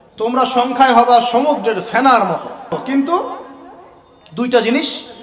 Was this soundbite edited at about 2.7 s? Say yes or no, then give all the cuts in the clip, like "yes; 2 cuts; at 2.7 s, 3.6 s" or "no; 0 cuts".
yes; 1 cut; at 2.7 s